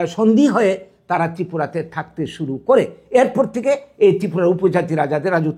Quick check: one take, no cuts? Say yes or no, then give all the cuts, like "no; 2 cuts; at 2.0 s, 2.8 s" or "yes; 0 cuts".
yes; 0 cuts